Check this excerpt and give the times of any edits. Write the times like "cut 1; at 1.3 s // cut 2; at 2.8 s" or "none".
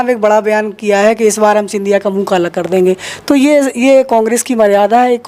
none